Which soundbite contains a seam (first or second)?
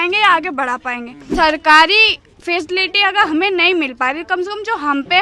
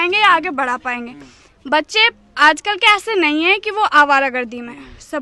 first